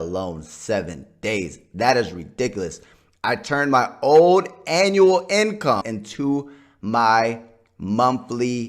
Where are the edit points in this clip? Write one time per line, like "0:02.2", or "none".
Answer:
0:05.9